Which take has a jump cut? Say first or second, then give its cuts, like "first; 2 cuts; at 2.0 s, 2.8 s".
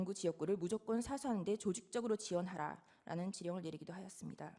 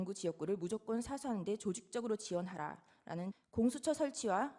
second; 1 cut; at 3.4 s